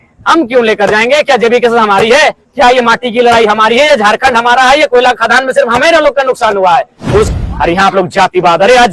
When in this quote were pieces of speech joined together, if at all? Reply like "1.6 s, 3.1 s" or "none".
7.3 s